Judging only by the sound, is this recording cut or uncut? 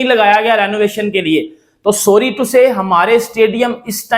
uncut